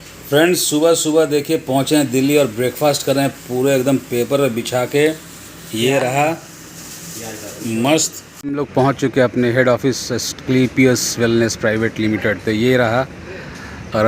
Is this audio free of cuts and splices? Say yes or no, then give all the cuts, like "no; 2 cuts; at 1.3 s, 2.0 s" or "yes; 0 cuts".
no; 1 cut; at 8.4 s